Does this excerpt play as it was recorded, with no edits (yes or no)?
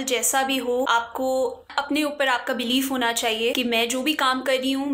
no